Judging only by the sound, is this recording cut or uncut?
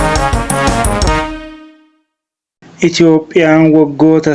cut